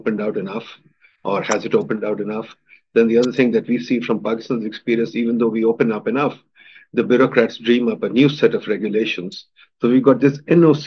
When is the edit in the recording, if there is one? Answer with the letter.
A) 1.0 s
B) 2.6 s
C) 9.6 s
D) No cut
D